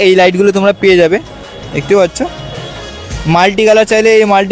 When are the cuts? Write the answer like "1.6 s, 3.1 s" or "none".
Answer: none